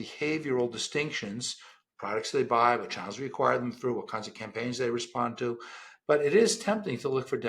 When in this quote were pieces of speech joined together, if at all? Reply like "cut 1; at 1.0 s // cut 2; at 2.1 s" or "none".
none